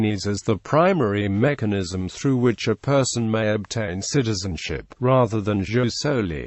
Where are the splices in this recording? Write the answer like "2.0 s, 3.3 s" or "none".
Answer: 2.8 s